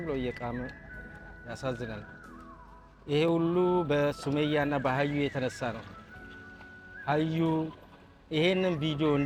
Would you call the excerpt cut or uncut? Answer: uncut